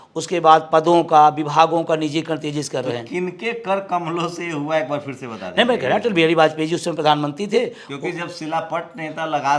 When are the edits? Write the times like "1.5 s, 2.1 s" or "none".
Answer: none